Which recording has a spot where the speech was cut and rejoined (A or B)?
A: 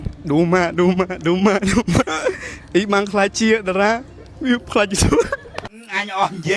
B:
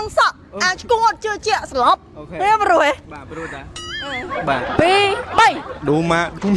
B